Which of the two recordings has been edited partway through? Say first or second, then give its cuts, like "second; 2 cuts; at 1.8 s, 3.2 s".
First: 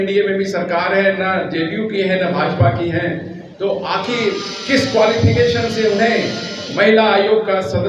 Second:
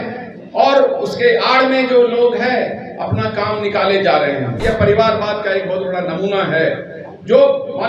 second; 1 cut; at 4.6 s